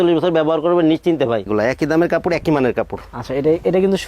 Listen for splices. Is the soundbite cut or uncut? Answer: cut